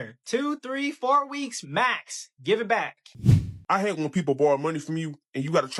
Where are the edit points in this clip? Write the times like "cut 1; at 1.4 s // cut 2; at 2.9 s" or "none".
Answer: cut 1; at 3.0 s